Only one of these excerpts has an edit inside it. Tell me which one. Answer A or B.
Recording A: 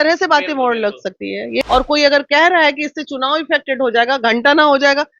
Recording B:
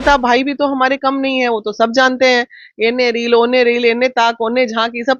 A